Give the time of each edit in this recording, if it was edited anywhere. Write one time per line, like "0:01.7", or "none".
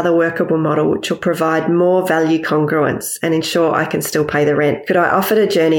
0:04.8